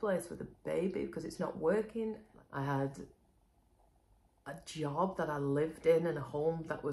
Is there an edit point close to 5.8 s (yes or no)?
no